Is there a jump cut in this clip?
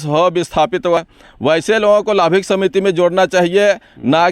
yes; 1 cut; at 1.0 s

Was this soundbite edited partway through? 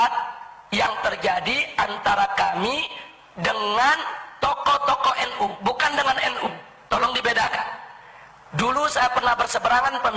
no; 0 cuts

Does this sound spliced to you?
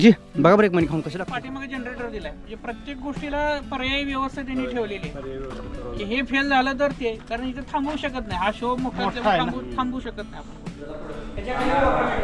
yes; 2 cuts; at 1.1 s, 11.1 s

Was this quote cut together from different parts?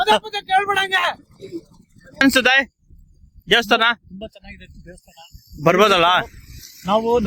yes; 1 cut; at 2.2 s

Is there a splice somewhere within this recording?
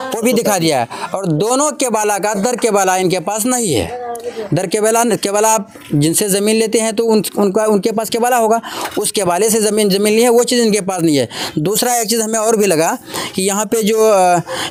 no; 0 cuts

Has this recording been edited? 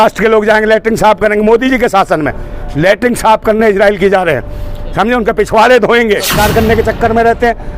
yes; 1 cut; at 6.4 s

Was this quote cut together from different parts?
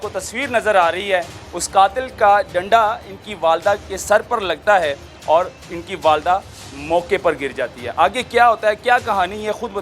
no; 0 cuts

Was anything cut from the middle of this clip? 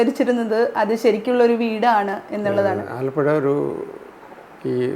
yes; 1 cut; at 3.0 s

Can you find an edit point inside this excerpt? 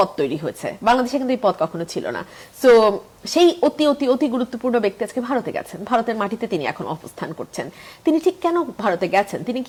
no; 0 cuts

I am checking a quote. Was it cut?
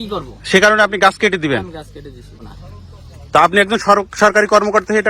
yes; 1 cut; at 2.5 s

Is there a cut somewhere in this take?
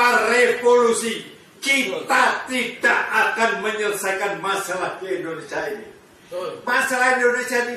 no; 0 cuts

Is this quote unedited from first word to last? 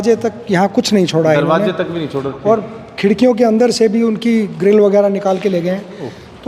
yes; 0 cuts

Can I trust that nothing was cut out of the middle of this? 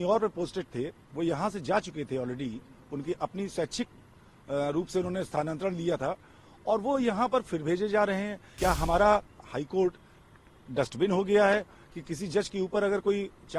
no; 1 cut; at 8.4 s

